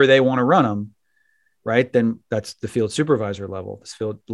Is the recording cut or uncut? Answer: uncut